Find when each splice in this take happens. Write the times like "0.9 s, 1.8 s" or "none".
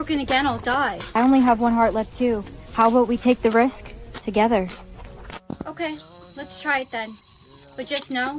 1.0 s